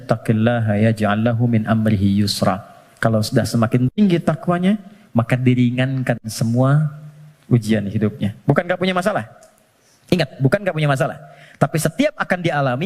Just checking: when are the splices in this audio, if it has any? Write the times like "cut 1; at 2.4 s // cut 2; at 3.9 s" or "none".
none